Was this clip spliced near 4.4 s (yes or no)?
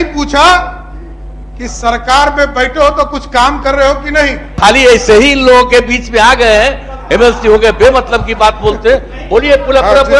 yes